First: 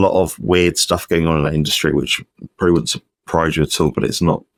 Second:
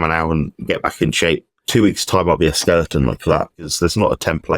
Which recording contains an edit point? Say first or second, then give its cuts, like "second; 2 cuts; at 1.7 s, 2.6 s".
second; 2 cuts; at 1.5 s, 3.6 s